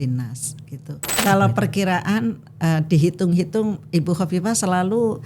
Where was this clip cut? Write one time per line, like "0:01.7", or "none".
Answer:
0:01.2